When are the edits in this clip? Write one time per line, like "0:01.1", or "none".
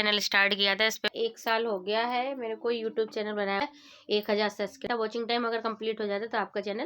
0:01.1
0:03.6
0:04.8